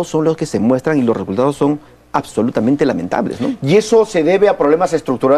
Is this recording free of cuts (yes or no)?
no